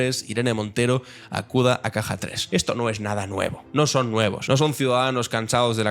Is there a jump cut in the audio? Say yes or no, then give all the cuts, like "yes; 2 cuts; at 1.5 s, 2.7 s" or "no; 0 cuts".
yes; 3 cuts; at 2.3 s, 3.6 s, 4.4 s